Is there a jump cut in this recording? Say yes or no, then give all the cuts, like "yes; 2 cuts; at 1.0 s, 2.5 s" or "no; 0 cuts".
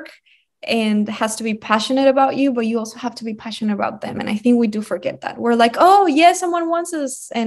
no; 0 cuts